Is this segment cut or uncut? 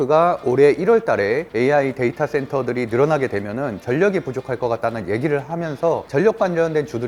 uncut